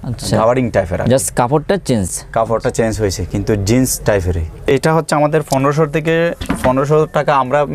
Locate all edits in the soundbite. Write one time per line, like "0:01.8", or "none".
none

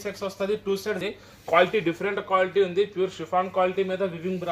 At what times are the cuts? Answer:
0:01.0

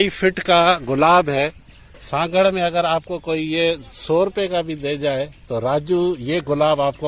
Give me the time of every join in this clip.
none

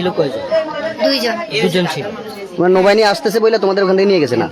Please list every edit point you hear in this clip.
none

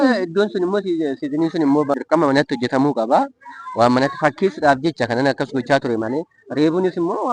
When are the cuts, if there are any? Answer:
0:02.0

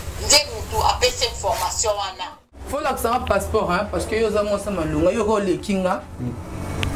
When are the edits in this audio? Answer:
0:02.7

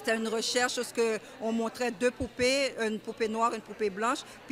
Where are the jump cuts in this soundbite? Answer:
none

